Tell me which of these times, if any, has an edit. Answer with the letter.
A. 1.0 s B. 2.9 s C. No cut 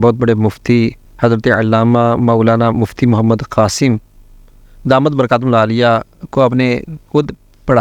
A